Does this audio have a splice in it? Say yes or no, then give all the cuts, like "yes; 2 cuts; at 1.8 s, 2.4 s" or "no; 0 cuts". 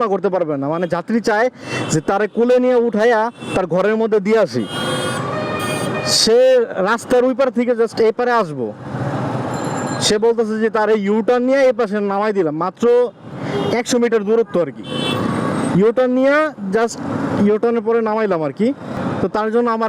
no; 0 cuts